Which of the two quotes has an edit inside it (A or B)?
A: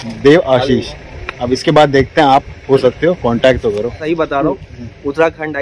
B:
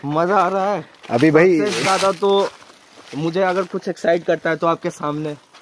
A